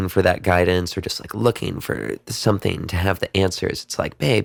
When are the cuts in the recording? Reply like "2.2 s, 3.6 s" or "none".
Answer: none